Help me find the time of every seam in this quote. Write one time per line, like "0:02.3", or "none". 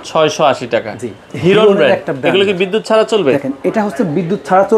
0:01.3